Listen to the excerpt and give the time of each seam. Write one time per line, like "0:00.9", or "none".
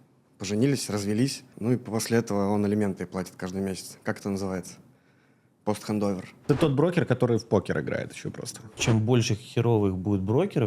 0:01.5
0:06.3
0:08.8